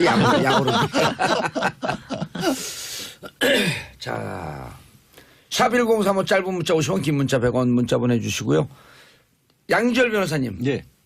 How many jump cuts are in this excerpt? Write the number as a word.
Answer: one